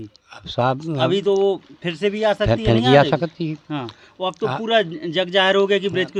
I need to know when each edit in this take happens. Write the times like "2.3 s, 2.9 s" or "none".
none